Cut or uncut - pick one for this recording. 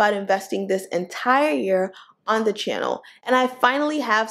uncut